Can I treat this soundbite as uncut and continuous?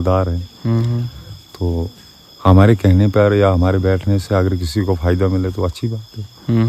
yes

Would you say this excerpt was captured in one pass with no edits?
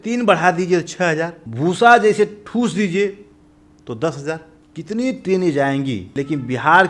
no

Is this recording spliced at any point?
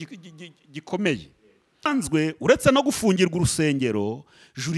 yes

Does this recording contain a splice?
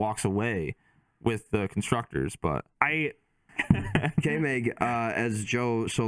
yes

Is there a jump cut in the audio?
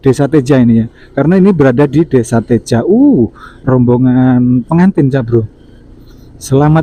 no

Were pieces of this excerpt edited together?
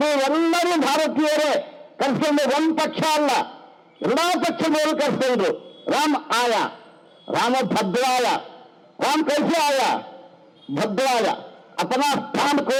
no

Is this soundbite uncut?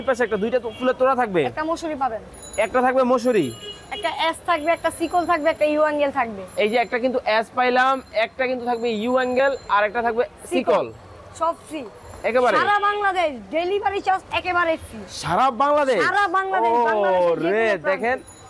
yes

